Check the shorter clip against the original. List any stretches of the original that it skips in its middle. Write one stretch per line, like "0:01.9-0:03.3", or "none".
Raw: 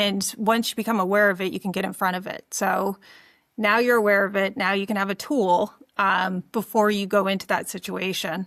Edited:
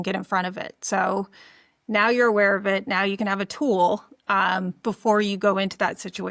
none